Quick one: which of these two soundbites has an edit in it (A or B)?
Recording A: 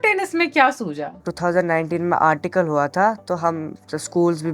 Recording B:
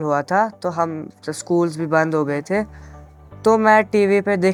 A